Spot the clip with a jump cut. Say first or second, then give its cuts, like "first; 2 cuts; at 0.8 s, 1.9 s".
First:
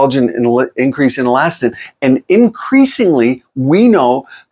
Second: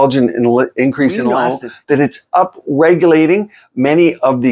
second; 1 cut; at 1.5 s